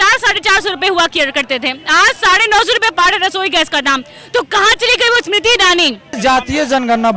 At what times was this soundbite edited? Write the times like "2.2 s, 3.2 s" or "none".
6.2 s